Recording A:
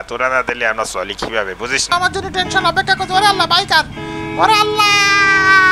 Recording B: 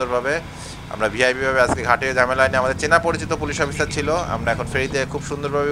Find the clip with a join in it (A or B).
A